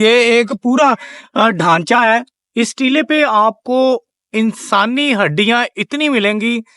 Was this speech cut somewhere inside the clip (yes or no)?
yes